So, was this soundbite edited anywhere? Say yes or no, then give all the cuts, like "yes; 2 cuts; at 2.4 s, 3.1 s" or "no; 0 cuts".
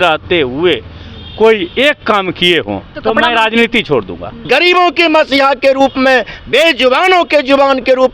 yes; 2 cuts; at 2.9 s, 4.3 s